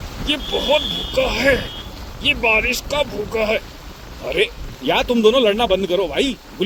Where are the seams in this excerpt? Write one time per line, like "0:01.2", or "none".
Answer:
none